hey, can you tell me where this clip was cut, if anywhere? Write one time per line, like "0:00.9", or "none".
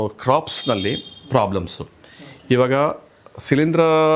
none

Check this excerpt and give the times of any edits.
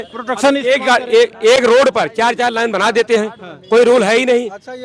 none

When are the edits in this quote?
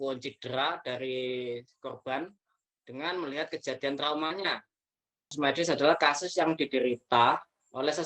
0:05.3

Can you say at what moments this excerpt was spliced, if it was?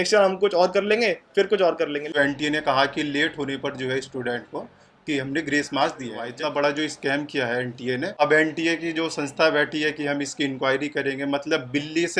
0:02.1
0:06.3
0:08.1

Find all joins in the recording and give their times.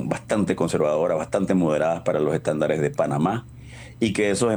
none

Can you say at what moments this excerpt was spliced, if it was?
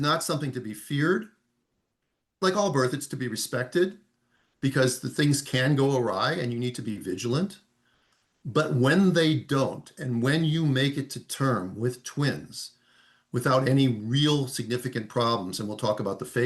0:02.4

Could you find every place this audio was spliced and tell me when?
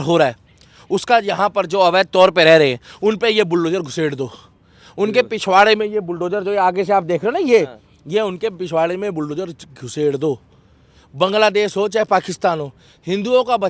none

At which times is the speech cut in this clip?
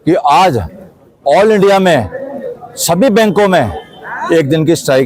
none

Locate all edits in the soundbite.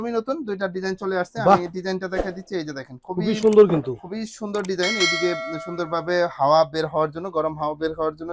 none

